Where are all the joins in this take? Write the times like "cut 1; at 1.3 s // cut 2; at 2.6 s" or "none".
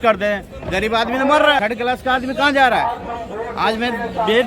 cut 1; at 1.6 s

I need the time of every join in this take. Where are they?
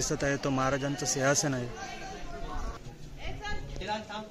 cut 1; at 2.8 s

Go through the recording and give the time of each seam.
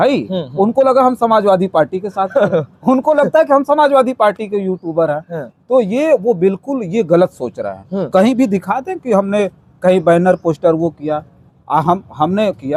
none

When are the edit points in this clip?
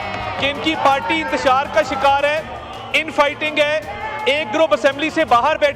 none

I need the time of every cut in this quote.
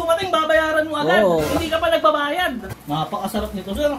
cut 1; at 2.7 s

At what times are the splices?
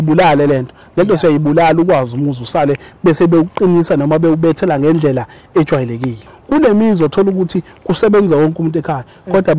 cut 1; at 6.2 s

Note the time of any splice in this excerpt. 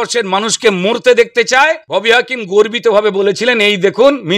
cut 1; at 1.8 s

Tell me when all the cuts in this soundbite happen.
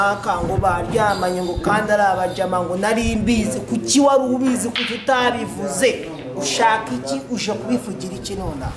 none

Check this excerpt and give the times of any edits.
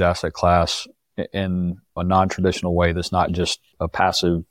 cut 1; at 1.9 s

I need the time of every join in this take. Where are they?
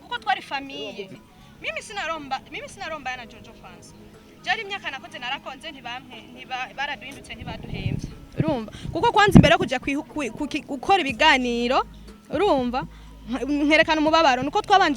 cut 1; at 1.1 s

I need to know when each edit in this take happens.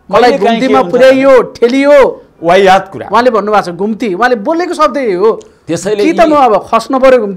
none

